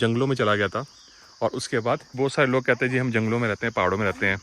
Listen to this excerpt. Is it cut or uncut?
cut